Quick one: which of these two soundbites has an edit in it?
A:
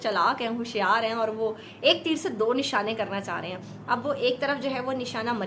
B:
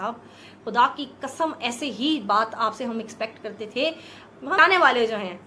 B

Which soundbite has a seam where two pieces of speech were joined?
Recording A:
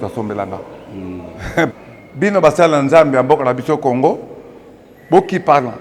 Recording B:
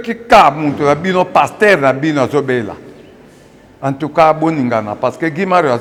A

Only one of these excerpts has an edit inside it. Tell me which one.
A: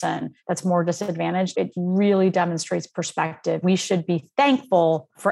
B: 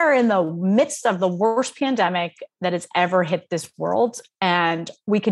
A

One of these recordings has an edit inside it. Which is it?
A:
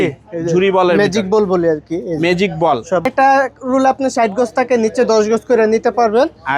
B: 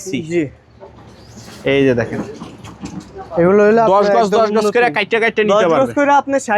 A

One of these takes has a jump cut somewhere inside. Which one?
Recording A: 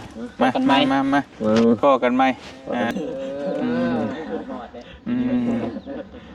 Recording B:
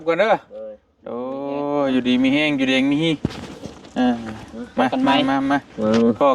A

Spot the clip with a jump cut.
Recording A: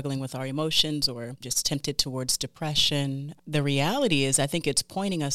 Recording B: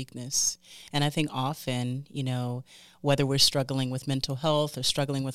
A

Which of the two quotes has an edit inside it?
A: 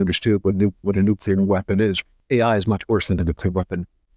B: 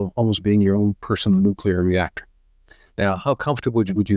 A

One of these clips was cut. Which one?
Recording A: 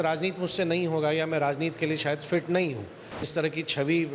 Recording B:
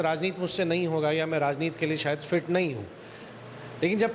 A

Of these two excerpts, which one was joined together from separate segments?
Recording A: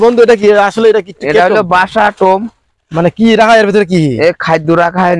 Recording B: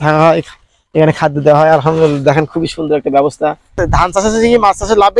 B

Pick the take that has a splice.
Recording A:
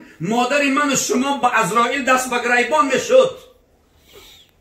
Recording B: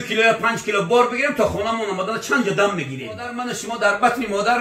B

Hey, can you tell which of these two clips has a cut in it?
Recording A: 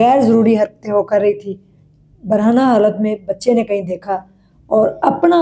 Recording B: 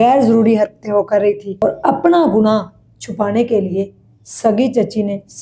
B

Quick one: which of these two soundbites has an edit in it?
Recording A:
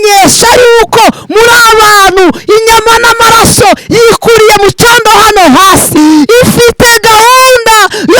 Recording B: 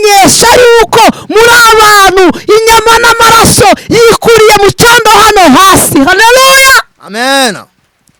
A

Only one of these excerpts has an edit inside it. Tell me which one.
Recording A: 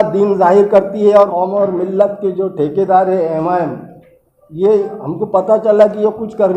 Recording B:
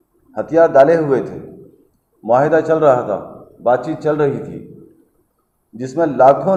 A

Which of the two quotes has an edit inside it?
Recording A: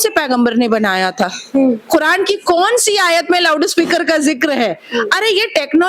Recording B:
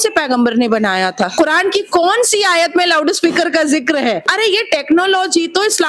B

